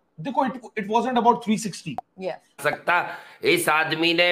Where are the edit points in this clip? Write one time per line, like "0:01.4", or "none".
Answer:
0:02.6